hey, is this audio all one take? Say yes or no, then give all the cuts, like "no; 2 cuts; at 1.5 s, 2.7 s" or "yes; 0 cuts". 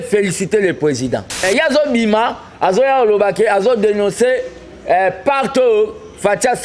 no; 1 cut; at 1.4 s